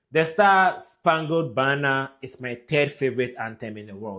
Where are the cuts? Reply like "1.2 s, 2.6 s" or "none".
none

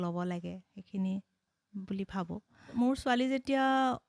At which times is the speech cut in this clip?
2.7 s

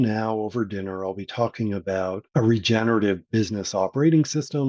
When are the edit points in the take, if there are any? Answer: 2.2 s

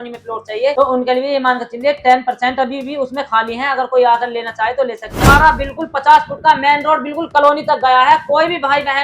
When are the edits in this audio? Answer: 5.2 s

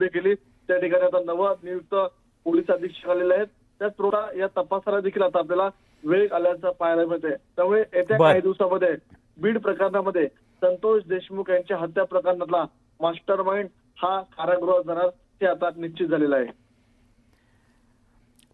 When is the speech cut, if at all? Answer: 4.1 s

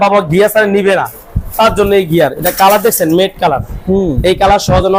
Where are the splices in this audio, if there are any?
none

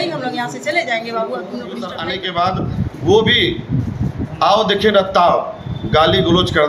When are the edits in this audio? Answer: 2.1 s

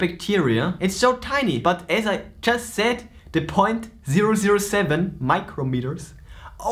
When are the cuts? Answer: 1.6 s

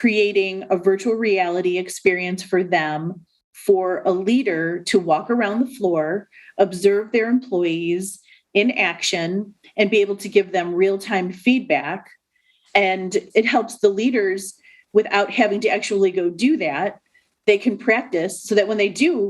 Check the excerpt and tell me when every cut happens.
17.4 s

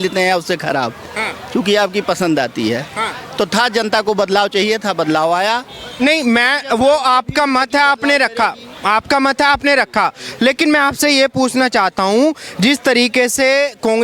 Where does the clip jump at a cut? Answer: none

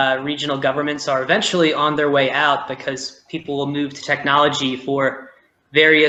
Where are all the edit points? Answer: none

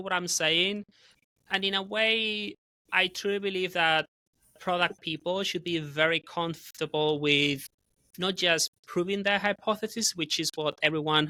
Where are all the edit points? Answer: none

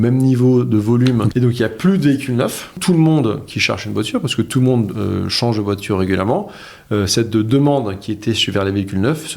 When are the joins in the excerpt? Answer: 1.3 s, 2.8 s

